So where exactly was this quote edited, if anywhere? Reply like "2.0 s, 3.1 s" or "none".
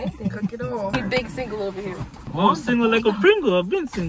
0.9 s, 2.2 s